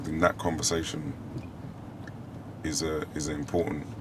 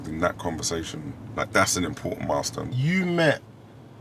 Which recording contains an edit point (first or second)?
second